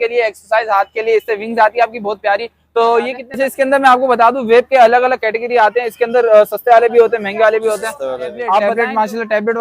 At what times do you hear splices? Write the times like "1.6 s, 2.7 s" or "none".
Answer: 3.2 s, 8.7 s